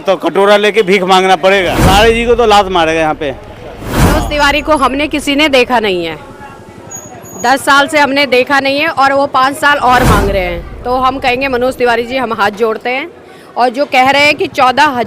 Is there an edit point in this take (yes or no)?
yes